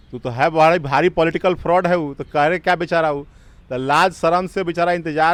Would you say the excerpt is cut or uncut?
uncut